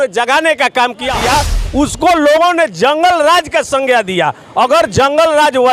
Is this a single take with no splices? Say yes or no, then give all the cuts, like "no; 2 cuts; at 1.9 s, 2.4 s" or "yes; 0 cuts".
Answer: no; 1 cut; at 1.2 s